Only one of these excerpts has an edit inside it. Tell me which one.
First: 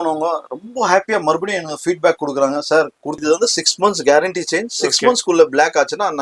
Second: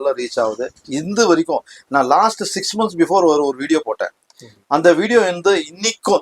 first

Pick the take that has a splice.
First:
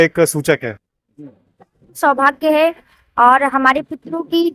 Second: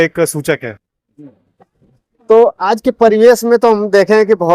first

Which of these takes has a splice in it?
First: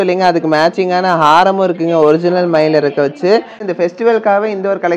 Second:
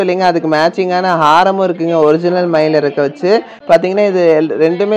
first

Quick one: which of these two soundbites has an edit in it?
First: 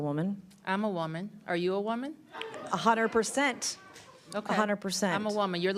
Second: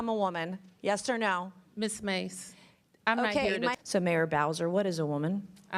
second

